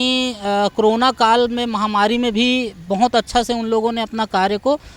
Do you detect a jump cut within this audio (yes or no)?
no